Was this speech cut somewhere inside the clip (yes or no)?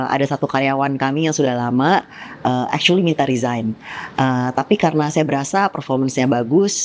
no